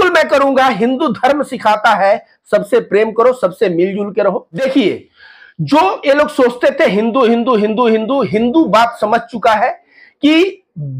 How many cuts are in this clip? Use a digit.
1